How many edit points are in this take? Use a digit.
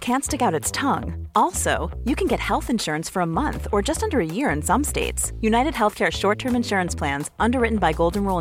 0